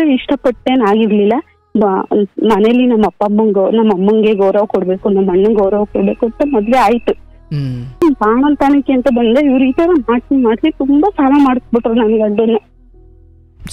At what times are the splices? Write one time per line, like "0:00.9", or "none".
0:08.0

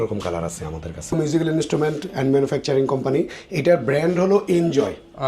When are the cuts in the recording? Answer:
0:01.1

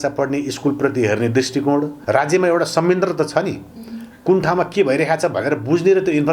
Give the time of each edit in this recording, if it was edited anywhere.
0:02.0

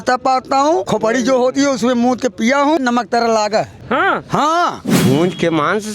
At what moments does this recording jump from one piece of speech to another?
0:00.9
0:02.8
0:03.8
0:04.9

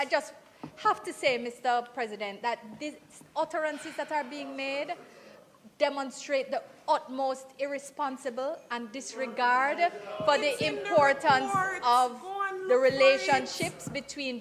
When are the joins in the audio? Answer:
none

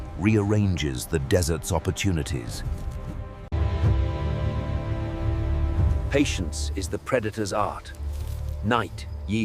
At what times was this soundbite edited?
none

